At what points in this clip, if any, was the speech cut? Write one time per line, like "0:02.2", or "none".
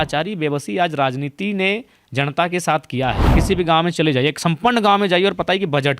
0:03.3